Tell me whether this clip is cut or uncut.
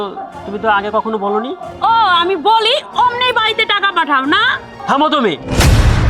uncut